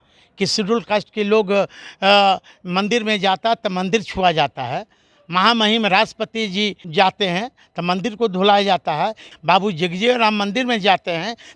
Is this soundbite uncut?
no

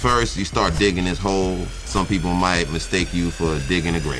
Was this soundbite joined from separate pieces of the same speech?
yes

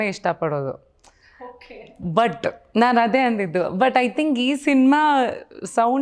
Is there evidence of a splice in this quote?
no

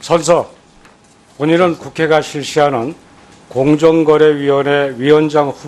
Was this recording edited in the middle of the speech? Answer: no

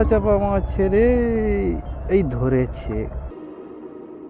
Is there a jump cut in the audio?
no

